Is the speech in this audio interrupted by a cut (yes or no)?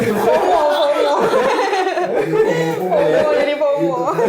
no